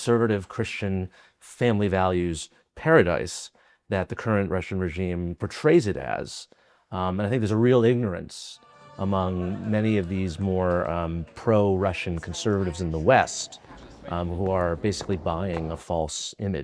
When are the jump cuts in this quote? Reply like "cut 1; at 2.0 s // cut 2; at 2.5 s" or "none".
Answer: none